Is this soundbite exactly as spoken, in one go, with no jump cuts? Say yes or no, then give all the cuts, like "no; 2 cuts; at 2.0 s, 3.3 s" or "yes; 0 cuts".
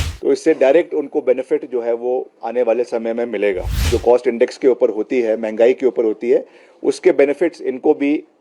no; 1 cut; at 3.9 s